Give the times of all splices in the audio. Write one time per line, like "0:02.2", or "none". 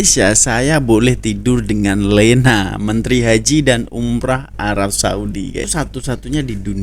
0:05.7

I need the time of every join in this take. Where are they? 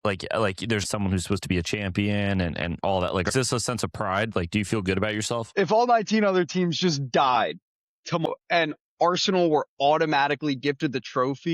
0:00.8
0:03.3
0:05.5
0:08.3

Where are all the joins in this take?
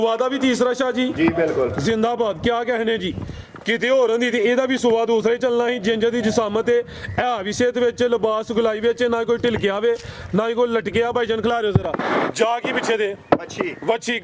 none

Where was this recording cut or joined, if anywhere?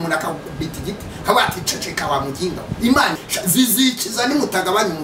0:03.2

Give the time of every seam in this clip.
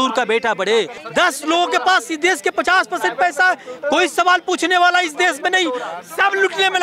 0:01.0
0:06.0

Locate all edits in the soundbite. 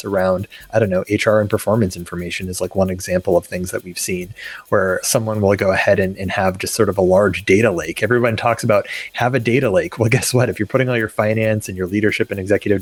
none

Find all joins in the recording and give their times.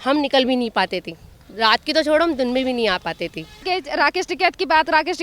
0:03.6

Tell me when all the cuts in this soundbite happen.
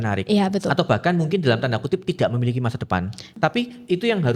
0:03.2

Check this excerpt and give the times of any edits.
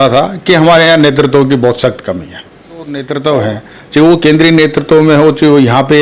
0:03.0

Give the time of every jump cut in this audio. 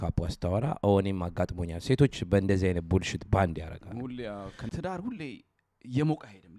0:04.6

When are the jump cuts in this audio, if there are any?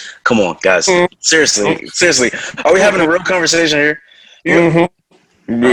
none

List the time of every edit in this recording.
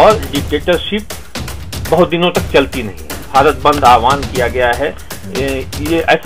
0:03.3

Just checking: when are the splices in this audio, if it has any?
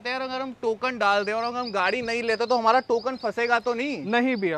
none

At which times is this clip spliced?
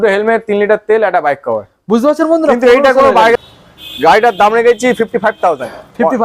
0:03.3

